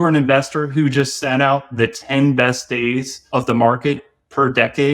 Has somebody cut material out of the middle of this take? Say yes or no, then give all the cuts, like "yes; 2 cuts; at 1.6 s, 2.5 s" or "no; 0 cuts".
yes; 1 cut; at 3.1 s